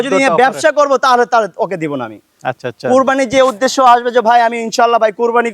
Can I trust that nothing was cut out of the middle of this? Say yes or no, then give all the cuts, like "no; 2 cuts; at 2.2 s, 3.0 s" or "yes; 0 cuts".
yes; 0 cuts